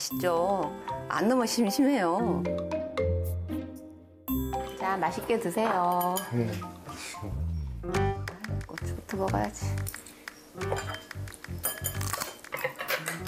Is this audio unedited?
yes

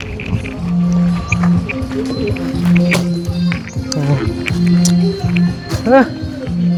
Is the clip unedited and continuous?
yes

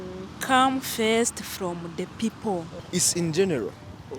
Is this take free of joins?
no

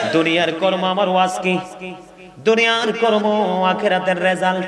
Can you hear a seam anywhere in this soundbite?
no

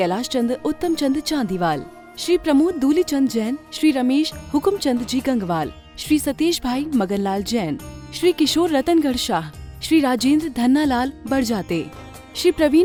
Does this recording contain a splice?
no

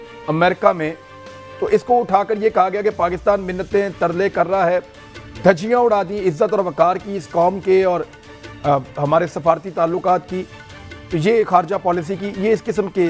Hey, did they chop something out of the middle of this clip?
no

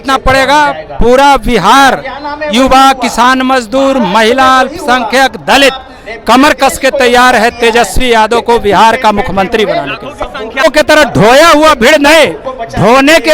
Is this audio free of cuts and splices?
no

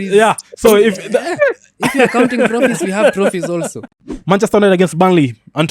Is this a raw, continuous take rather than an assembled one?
no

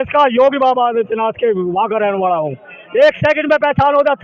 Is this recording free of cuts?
yes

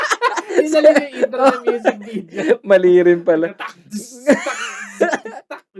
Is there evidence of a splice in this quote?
no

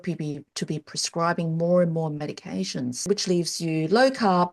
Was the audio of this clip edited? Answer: yes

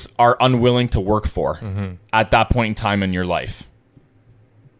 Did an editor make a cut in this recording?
no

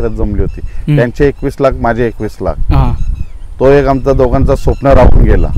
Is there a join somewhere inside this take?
no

